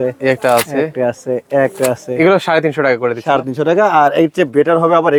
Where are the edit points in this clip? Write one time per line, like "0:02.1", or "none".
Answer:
none